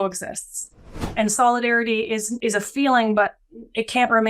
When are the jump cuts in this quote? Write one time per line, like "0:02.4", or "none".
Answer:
0:01.1
0:02.3